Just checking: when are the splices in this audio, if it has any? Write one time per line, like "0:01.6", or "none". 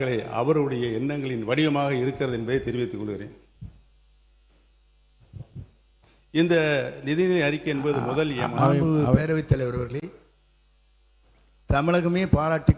none

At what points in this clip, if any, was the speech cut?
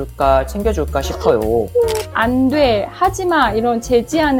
0:02.1

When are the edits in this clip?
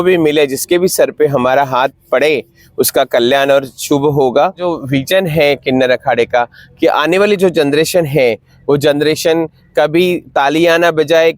0:04.7

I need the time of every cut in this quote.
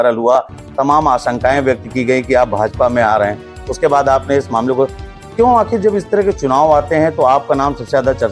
none

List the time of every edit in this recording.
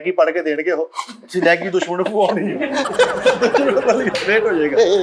none

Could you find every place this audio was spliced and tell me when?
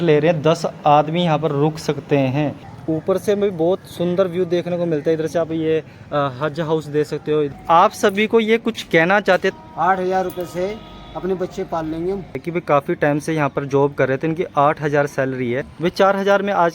0:02.7
0:07.6
0:09.6
0:12.4
0:15.7

